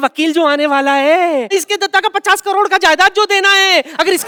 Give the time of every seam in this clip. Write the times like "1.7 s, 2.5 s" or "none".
none